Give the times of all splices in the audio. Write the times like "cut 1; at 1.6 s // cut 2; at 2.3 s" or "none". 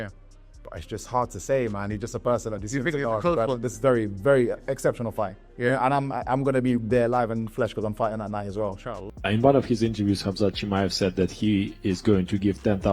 cut 1; at 9.0 s